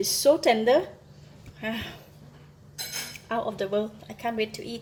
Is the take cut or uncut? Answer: uncut